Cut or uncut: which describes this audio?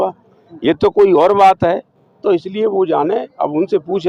uncut